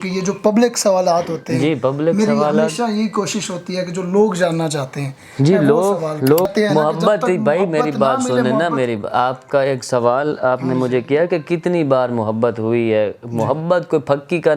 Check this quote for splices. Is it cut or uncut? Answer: cut